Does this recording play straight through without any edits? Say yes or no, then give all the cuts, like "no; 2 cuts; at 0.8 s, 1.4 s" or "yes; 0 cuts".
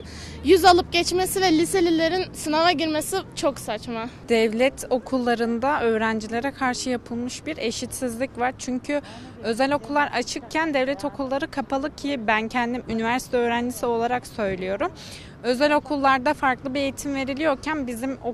yes; 0 cuts